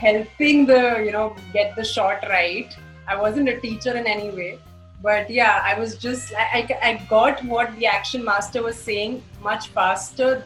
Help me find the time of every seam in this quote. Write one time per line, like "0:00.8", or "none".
none